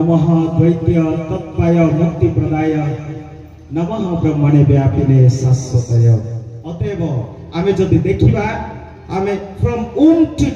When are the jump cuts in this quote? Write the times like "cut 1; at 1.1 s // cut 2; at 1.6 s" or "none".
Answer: cut 1; at 6.6 s

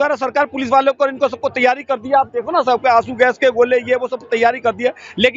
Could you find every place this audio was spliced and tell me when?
none

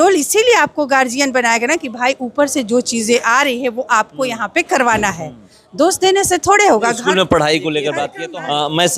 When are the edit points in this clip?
none

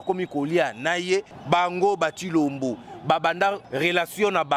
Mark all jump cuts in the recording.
cut 1; at 1.3 s // cut 2; at 3.6 s

